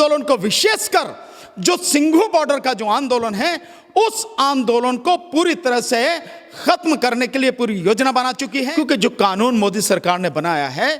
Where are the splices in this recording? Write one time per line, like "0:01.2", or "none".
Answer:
0:08.6

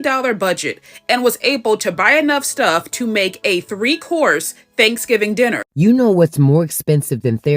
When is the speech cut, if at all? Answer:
0:05.7

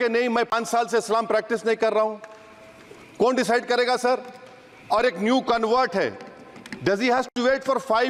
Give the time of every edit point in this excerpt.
none

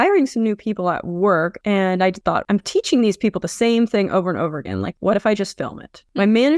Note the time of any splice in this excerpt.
0:01.6
0:02.4

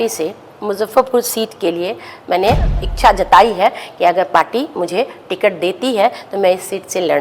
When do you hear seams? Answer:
0:02.9

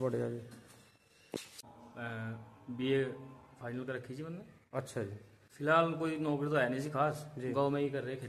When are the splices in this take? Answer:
0:01.3

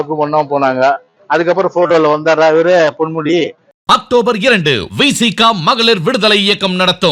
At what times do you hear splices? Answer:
0:01.1
0:03.7

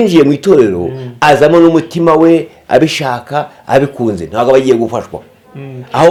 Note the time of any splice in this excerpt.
none

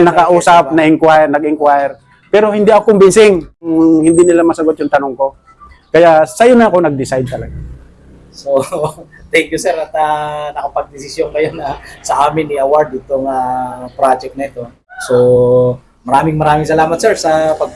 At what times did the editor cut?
0:03.6
0:14.9

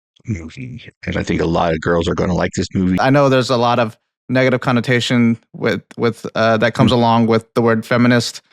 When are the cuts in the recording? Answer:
0:03.0

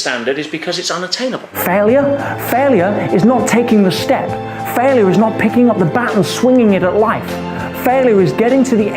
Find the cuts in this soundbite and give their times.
0:01.5

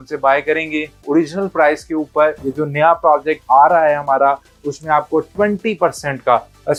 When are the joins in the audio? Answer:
none

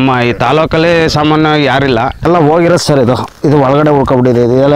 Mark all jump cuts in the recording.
0:02.2

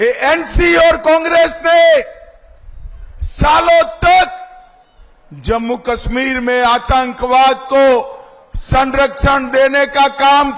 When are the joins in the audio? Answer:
none

